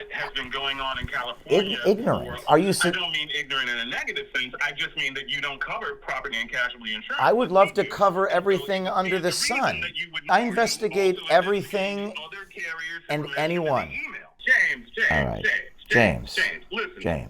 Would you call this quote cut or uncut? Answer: cut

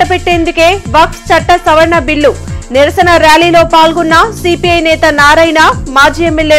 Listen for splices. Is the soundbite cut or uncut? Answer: uncut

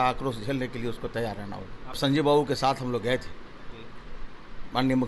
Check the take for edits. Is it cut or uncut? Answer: cut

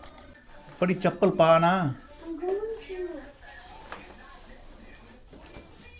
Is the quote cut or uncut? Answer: uncut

